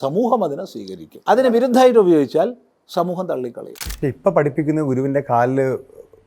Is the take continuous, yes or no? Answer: no